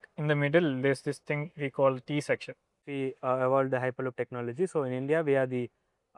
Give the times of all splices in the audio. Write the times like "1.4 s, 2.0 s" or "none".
2.9 s